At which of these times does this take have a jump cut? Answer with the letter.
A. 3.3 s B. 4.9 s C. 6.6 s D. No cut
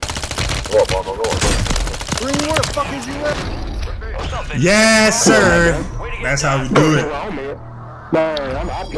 A